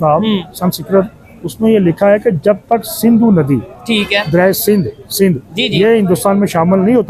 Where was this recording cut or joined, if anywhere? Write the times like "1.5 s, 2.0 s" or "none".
none